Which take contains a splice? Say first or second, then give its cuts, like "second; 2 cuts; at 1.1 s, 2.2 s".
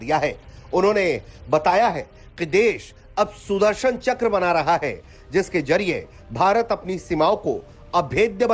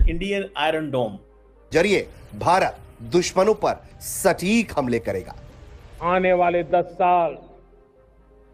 second; 1 cut; at 1.7 s